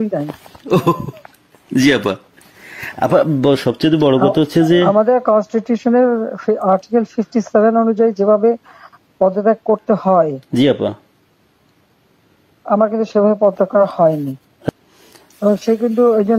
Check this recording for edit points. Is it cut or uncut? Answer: cut